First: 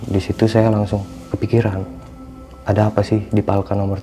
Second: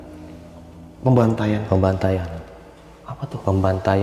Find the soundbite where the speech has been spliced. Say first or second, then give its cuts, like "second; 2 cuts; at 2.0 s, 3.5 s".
first; 1 cut; at 1.2 s